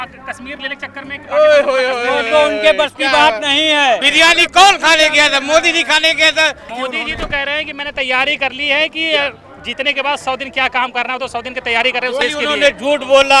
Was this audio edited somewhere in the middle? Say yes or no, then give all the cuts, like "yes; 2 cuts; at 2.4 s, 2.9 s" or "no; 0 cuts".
yes; 3 cuts; at 4.1 s, 6.7 s, 12.2 s